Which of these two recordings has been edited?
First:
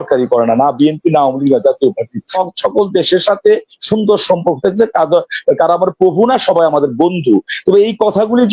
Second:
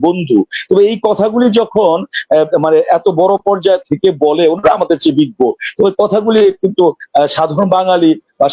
first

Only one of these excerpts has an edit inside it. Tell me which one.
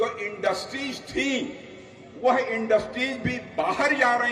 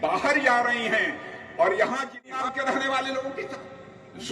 second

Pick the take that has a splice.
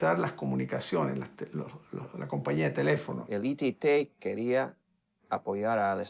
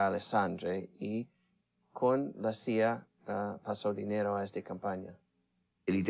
second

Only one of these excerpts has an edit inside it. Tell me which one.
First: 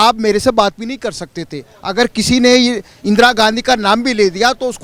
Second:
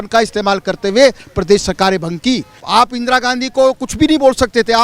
second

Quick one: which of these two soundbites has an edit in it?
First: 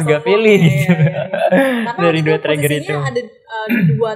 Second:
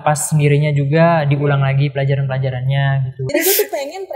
second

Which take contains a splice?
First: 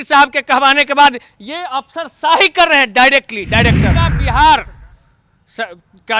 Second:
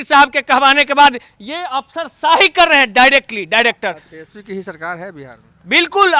first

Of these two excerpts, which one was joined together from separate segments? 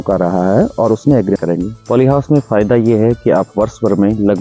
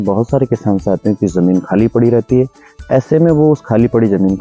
first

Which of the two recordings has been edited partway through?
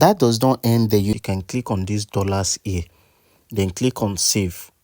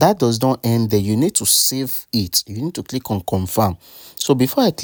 first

